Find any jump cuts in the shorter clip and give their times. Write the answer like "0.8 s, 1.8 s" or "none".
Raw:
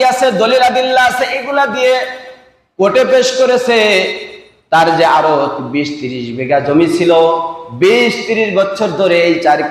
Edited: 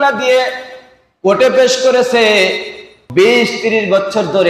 2.9 s